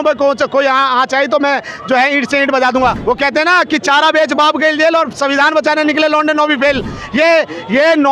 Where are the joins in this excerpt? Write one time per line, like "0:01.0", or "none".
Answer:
0:03.0